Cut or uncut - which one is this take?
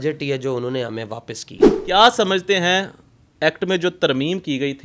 cut